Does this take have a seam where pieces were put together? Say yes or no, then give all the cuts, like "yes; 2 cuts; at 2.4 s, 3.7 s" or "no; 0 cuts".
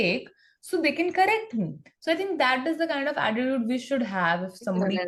no; 0 cuts